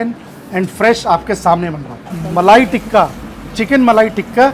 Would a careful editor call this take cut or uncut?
cut